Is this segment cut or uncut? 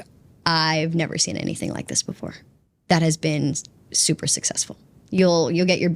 uncut